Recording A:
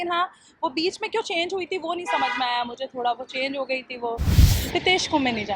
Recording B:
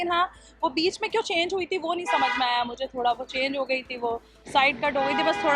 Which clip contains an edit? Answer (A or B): A